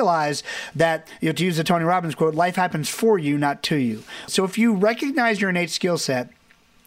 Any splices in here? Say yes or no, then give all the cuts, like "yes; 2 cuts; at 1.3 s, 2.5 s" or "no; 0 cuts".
yes; 1 cut; at 4.2 s